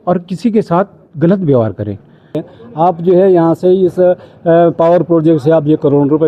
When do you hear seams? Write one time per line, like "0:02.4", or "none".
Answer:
0:02.5